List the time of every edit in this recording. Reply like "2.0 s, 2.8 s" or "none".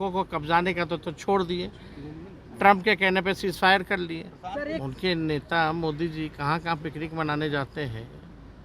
4.8 s